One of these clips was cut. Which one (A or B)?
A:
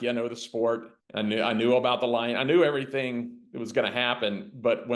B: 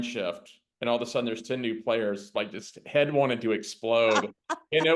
A